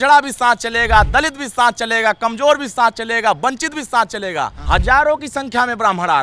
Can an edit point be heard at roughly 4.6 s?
yes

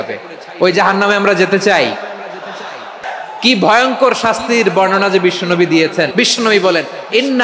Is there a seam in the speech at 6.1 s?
yes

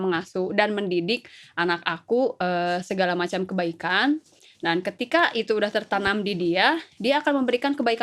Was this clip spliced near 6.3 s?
no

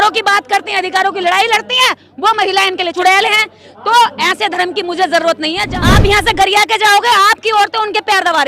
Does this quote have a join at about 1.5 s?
no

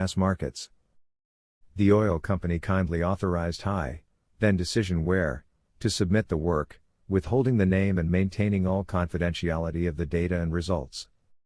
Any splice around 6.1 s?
no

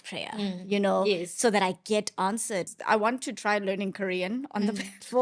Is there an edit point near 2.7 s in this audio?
yes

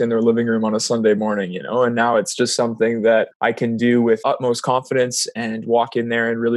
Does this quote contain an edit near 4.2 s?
yes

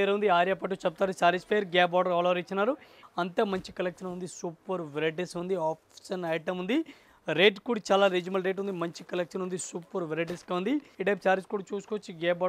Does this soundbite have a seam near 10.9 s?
yes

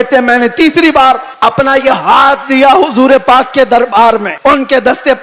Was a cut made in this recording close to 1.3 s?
yes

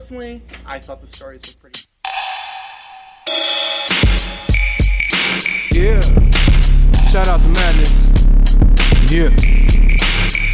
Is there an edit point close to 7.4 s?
no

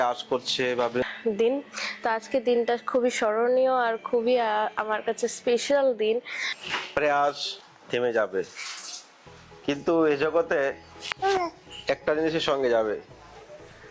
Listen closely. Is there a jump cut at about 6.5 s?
yes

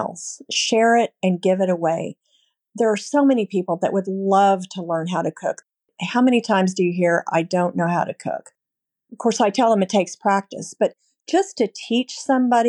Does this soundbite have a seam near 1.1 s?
no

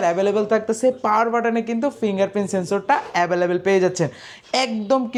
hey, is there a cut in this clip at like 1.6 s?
no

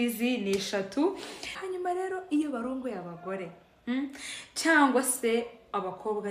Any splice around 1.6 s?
yes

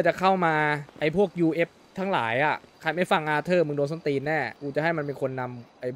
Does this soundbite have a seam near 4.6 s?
yes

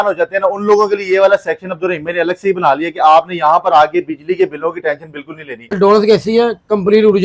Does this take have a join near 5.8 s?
yes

